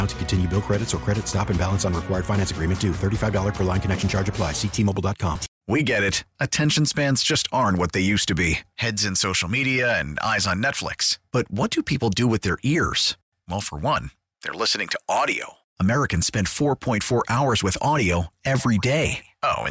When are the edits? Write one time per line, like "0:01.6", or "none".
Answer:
0:05.5